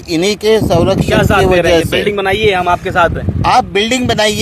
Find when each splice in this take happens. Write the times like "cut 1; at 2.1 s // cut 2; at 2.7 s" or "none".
none